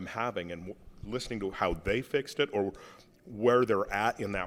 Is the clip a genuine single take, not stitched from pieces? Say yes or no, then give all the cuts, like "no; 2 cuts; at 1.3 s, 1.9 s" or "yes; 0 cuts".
yes; 0 cuts